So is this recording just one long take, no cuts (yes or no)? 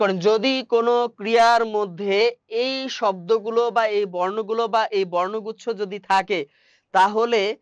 yes